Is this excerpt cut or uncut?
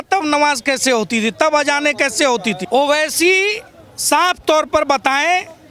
uncut